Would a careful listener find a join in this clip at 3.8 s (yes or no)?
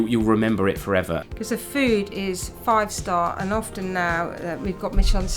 no